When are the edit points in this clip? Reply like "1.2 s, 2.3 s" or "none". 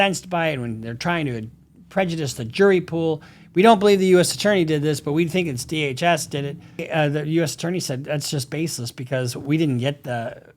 6.9 s